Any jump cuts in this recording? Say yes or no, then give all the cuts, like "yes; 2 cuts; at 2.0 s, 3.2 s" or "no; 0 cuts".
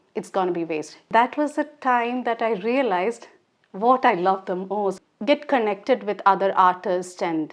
yes; 2 cuts; at 1.1 s, 5.0 s